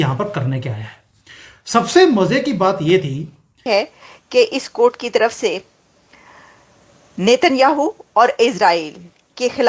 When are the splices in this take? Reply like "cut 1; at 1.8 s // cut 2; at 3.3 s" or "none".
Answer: cut 1; at 3.7 s